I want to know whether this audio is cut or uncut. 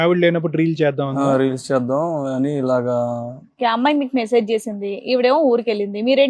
cut